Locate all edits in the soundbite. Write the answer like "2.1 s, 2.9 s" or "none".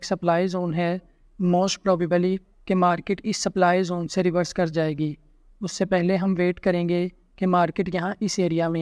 none